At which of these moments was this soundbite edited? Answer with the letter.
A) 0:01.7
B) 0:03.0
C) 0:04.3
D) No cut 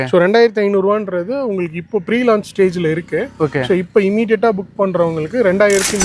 D